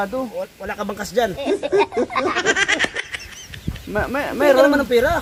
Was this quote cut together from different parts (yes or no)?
no